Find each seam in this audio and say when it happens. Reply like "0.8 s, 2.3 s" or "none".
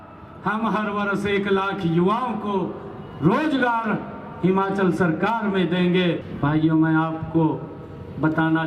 6.3 s

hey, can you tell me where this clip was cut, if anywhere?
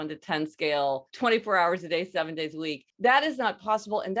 1.1 s, 2.8 s

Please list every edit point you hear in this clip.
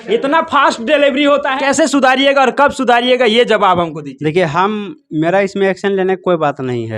1.5 s

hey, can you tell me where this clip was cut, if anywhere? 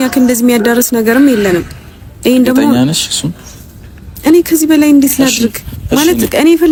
none

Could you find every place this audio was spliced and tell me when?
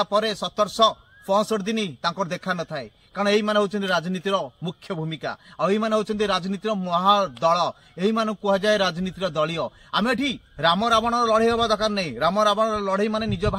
none

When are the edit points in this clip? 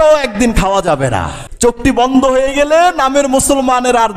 1.4 s

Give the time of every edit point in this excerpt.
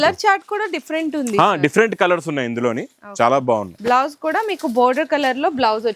none

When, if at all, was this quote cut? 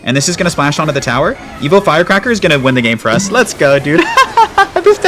none

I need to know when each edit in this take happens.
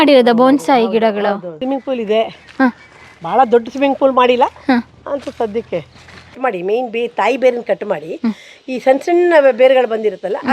1.6 s, 6.3 s

